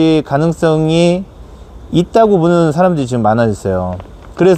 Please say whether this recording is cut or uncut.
uncut